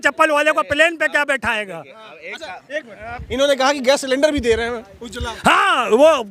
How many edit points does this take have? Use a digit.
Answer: 0